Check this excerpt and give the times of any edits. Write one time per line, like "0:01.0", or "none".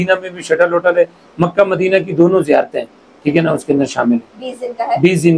none